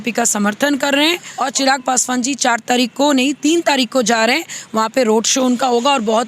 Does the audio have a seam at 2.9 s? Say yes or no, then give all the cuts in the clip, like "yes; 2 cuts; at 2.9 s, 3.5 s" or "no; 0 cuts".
no; 1 cut; at 1.3 s